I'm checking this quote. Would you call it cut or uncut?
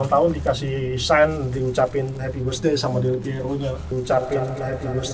uncut